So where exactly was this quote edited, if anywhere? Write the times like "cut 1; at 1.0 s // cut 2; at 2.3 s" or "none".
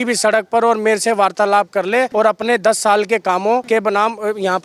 cut 1; at 2.1 s // cut 2; at 3.6 s

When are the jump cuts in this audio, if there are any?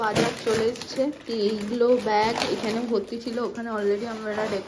none

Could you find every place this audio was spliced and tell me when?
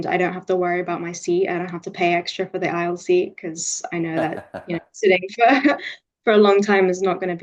none

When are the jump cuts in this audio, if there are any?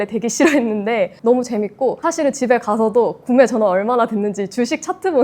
cut 1; at 1.1 s // cut 2; at 2.0 s

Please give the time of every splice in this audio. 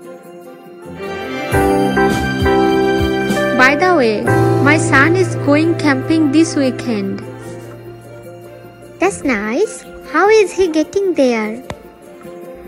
cut 1; at 8.1 s

